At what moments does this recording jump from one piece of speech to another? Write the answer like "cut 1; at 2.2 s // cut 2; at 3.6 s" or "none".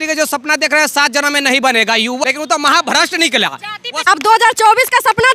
cut 1; at 2.2 s // cut 2; at 4.0 s